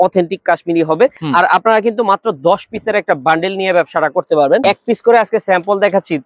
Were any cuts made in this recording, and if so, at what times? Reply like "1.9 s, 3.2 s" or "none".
1.2 s, 4.6 s